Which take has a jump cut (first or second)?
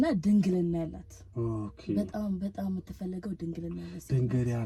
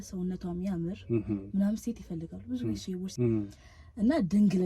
second